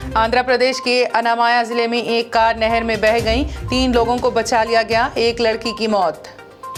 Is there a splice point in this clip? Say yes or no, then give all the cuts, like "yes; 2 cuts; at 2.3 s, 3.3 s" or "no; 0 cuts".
no; 0 cuts